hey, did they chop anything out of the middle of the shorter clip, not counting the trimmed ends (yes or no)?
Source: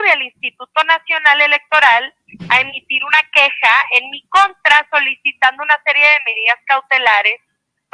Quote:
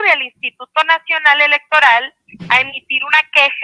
no